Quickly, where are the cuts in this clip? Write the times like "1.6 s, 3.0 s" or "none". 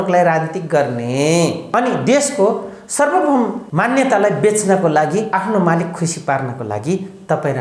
1.6 s, 3.6 s, 5.3 s